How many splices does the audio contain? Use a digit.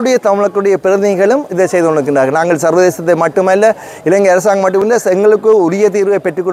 1